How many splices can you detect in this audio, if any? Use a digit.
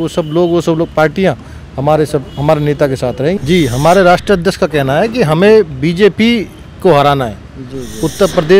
1